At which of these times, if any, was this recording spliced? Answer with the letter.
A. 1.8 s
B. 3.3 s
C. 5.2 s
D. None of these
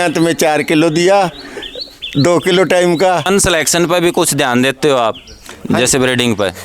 B